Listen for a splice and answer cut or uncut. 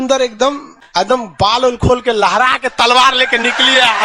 uncut